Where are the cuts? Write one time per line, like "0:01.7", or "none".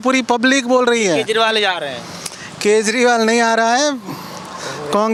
none

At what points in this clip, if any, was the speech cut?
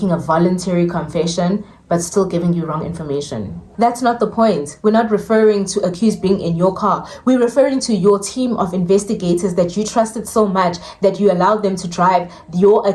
0:03.7

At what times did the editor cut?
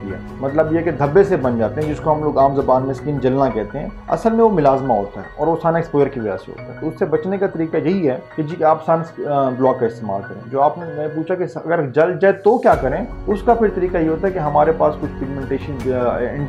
none

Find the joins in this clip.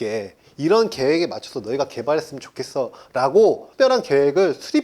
0:03.7

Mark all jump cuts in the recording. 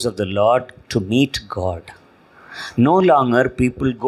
none

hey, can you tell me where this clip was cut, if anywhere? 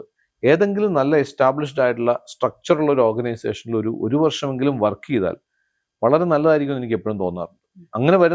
none

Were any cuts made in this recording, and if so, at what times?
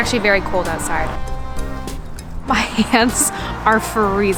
0:02.4

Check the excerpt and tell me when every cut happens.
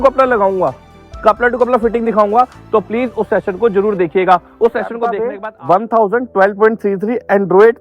0:05.3

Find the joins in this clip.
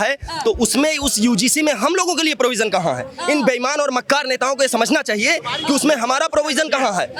none

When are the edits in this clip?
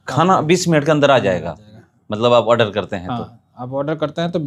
none

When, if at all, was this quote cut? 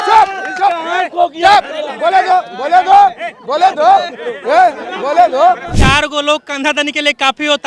0:05.7

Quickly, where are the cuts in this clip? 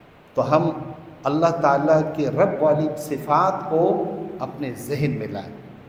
none

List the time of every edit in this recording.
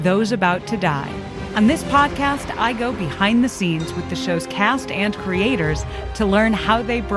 0:01.4

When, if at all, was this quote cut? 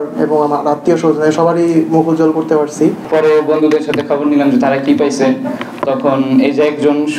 0:03.0

